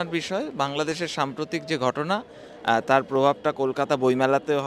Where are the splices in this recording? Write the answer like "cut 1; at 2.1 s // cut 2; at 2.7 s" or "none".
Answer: none